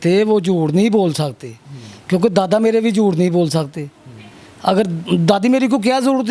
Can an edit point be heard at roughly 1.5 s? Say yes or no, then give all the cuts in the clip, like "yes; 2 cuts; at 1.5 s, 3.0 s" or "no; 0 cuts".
no; 0 cuts